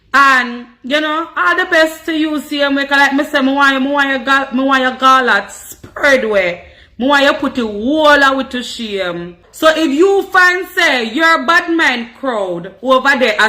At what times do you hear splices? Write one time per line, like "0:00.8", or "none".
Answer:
0:09.4